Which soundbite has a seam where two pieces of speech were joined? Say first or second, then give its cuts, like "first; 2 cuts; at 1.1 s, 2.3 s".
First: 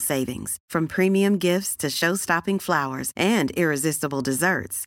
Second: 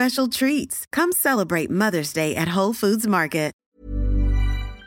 second; 1 cut; at 3.6 s